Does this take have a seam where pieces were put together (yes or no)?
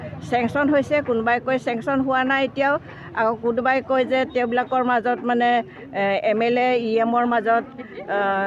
no